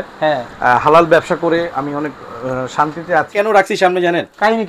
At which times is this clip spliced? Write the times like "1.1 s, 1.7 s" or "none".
3.3 s